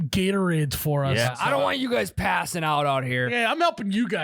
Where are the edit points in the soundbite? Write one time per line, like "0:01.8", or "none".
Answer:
0:01.3
0:03.3